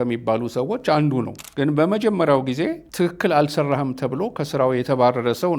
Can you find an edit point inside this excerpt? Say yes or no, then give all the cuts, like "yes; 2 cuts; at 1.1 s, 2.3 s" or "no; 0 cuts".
yes; 2 cuts; at 1.4 s, 2.8 s